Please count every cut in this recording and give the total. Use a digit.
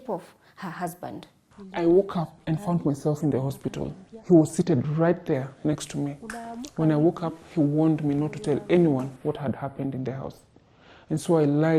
1